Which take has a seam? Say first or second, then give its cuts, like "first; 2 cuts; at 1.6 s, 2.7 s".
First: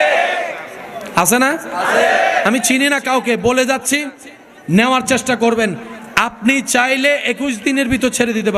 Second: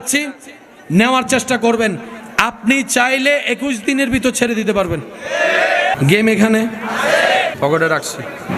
second; 2 cuts; at 5.9 s, 7.6 s